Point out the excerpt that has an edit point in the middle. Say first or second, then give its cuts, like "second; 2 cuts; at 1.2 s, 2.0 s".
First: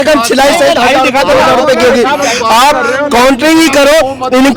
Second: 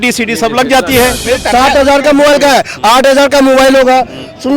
second; 1 cut; at 1.2 s